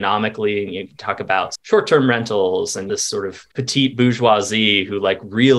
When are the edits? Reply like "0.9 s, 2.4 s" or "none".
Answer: 1.5 s, 3.0 s